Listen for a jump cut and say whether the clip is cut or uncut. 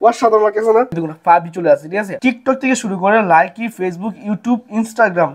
cut